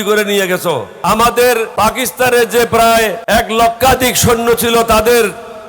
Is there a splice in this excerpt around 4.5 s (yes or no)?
no